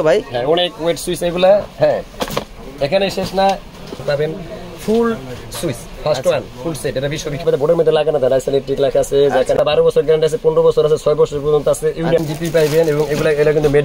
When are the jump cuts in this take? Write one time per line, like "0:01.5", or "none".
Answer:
0:04.0
0:07.4
0:09.6
0:12.2